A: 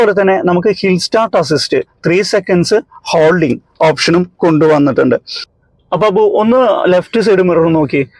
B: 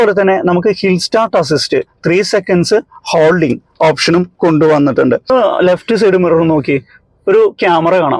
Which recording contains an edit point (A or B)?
B